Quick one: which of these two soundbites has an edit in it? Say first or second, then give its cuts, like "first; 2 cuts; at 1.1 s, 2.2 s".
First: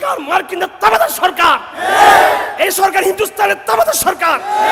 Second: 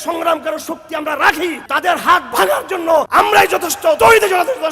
second; 3 cuts; at 1.6 s, 3.1 s, 4.0 s